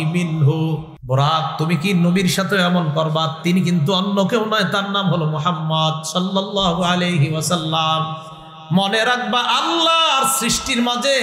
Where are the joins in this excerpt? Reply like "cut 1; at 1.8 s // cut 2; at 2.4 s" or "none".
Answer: cut 1; at 0.9 s